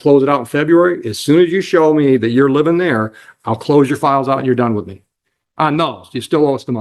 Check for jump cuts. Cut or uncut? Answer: uncut